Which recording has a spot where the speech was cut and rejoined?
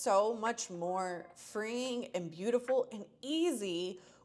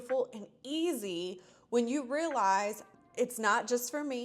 second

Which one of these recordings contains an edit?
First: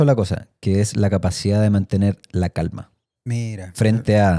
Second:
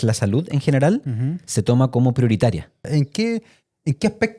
second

